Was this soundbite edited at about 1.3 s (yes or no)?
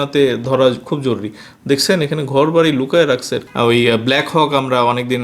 no